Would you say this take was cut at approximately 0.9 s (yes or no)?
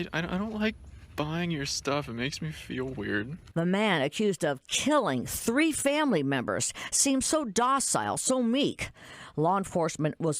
no